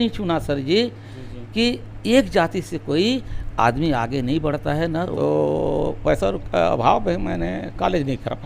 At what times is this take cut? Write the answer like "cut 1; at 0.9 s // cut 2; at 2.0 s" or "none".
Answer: cut 1; at 5.1 s